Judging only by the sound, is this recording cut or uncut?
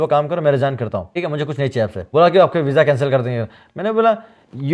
cut